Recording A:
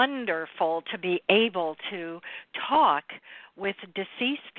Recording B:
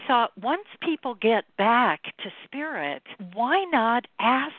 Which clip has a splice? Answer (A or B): B